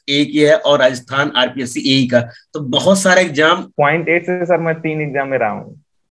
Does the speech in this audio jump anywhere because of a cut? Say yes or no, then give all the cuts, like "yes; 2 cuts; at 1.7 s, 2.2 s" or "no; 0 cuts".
yes; 1 cut; at 3.7 s